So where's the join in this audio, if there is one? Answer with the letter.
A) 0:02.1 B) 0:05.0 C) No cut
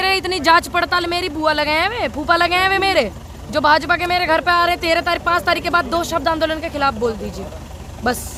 C